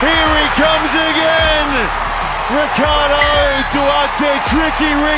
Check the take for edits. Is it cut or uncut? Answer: uncut